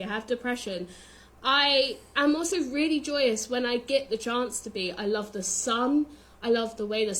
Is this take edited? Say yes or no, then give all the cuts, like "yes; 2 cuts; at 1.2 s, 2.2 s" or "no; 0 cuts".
yes; 1 cut; at 2.0 s